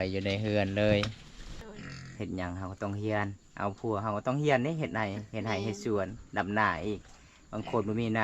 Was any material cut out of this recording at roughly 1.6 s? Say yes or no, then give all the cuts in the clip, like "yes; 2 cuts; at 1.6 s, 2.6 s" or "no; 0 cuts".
yes; 1 cut; at 1.6 s